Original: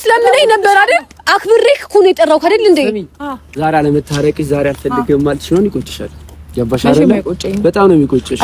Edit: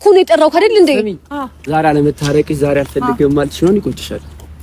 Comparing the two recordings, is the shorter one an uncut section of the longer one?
yes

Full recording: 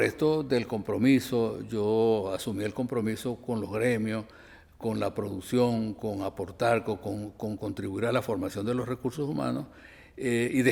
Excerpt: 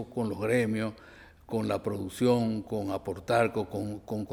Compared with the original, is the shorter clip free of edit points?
yes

